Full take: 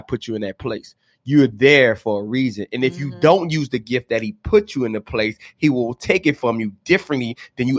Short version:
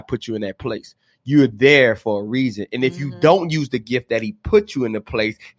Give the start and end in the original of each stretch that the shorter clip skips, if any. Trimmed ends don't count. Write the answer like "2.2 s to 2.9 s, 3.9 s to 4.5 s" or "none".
none